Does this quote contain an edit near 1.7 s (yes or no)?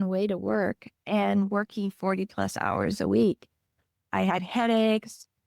no